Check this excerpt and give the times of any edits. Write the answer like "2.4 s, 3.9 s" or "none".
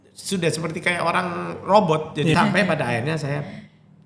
2.3 s

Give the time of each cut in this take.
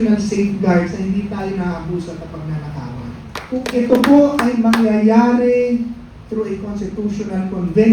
3.4 s

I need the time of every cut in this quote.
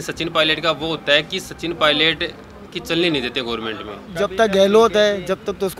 4.0 s

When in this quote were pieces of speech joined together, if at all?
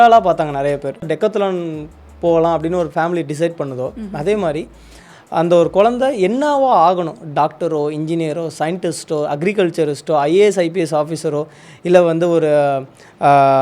1.1 s

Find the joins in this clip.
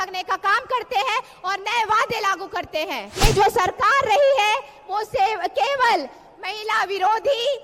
3.1 s

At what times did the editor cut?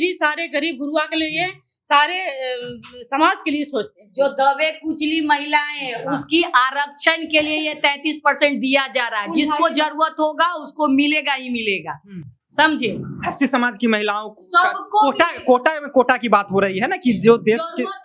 none

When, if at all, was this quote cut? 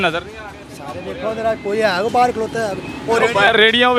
none

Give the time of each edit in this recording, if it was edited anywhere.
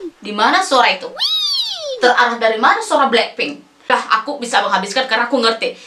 3.9 s

